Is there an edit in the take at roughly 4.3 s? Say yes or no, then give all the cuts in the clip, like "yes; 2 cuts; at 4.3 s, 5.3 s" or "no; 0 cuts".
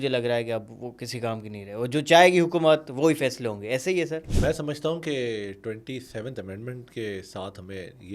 yes; 1 cut; at 4.3 s